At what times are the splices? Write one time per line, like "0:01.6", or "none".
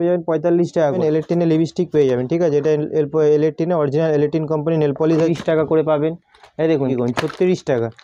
0:01.0
0:05.3
0:06.9